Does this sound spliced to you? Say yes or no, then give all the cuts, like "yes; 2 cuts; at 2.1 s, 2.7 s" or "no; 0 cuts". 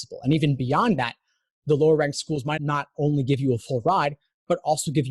yes; 1 cut; at 2.6 s